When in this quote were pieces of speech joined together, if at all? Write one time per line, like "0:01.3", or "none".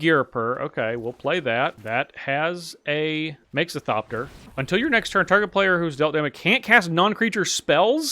0:01.8
0:03.4
0:04.4